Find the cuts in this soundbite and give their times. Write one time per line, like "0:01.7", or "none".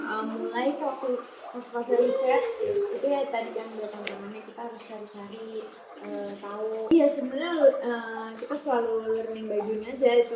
0:06.9